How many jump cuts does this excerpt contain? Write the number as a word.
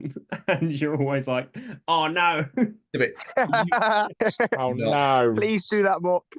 one